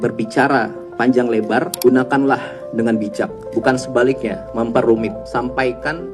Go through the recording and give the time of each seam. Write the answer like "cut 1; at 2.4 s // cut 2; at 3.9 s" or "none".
cut 1; at 1.7 s // cut 2; at 3.4 s // cut 3; at 4.4 s // cut 4; at 5.2 s